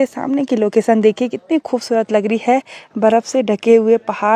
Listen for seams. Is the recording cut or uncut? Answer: uncut